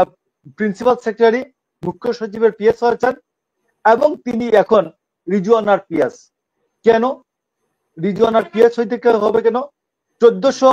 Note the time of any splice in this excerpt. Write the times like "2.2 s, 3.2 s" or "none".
none